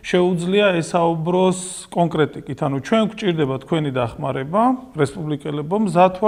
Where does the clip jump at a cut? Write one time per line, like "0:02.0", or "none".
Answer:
none

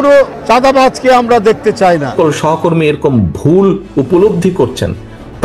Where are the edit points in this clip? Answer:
0:02.1

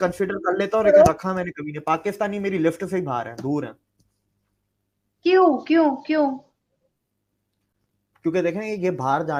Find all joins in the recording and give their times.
none

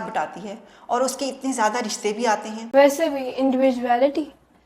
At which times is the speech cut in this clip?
0:02.6

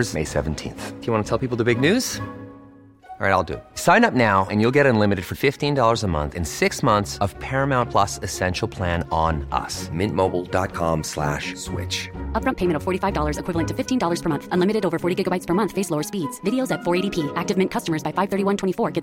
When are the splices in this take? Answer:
none

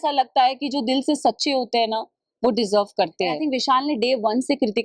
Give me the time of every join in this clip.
0:03.5

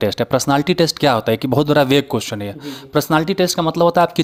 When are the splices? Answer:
none

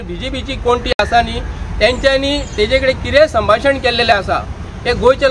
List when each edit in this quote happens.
none

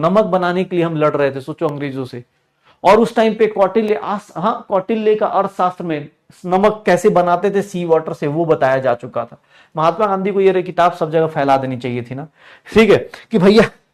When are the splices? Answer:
none

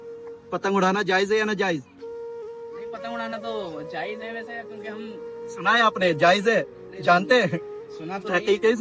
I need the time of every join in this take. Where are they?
none

